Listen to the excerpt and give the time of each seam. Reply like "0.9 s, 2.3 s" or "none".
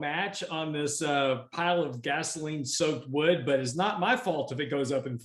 none

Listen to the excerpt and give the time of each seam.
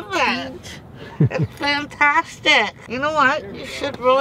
2.8 s

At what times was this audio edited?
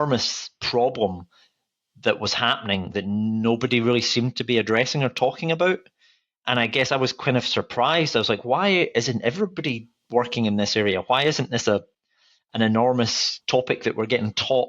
13.3 s

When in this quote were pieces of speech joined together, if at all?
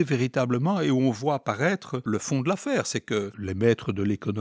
1.9 s, 3.4 s

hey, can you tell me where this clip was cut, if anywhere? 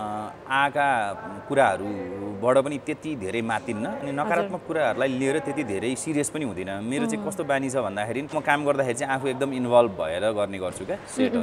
8.3 s

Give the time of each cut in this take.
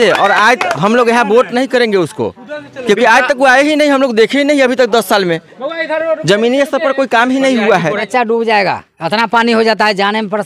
7.9 s

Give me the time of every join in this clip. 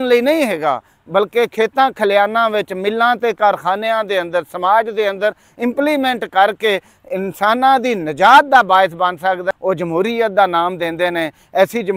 9.5 s

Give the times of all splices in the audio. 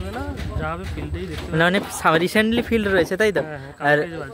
none

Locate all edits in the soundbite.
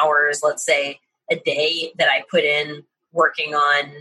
none

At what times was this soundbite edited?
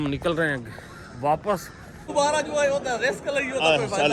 2.1 s

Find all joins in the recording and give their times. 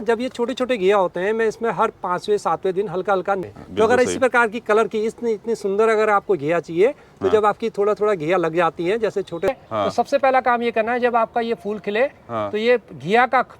3.4 s, 9.5 s

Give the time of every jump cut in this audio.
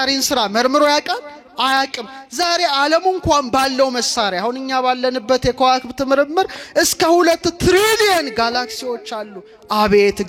none

